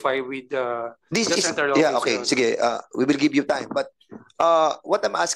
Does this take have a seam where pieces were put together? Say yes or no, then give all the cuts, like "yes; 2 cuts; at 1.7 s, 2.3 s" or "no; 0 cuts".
no; 0 cuts